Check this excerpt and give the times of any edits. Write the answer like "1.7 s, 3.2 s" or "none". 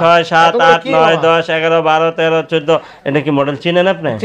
none